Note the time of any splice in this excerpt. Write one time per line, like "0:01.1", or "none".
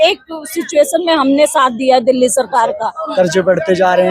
0:02.9